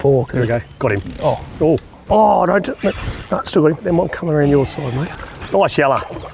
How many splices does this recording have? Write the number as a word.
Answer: two